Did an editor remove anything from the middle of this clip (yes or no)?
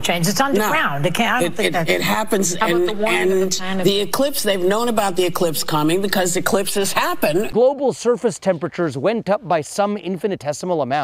yes